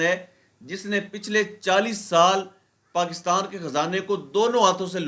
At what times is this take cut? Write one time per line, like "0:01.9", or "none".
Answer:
none

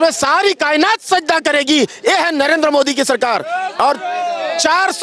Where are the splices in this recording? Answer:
none

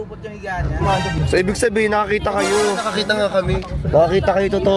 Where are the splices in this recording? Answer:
0:01.2

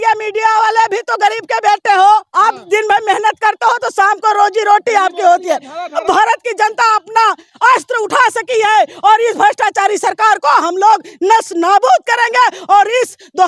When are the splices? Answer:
0:06.0

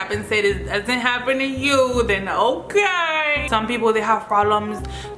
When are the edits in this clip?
0:03.4

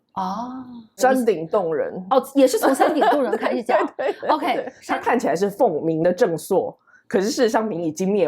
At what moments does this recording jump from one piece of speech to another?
0:00.9
0:04.7

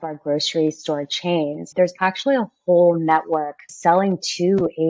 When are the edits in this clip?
0:01.7
0:03.7

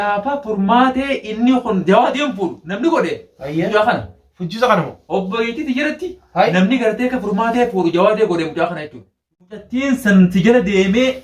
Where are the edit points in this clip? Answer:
0:09.4

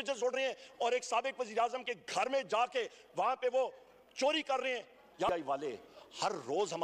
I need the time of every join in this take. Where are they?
0:05.3

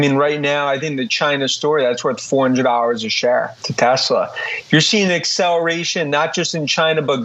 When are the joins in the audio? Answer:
none

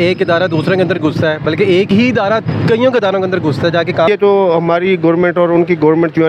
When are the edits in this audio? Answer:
0:04.1

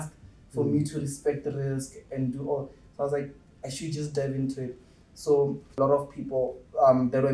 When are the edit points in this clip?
0:05.8

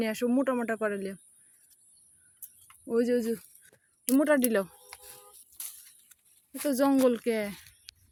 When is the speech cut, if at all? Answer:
none

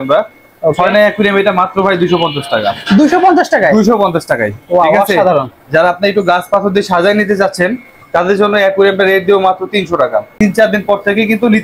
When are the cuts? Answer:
0:10.3

